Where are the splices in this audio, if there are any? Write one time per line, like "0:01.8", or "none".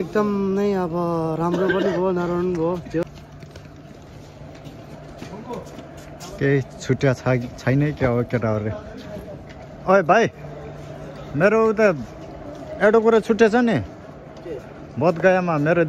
0:03.0